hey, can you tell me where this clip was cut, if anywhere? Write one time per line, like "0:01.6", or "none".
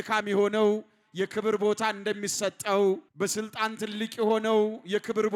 0:03.1